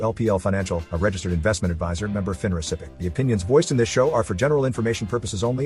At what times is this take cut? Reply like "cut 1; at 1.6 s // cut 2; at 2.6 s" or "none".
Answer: cut 1; at 2.9 s